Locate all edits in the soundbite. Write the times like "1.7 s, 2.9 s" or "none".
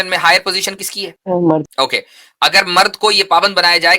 1.1 s, 1.7 s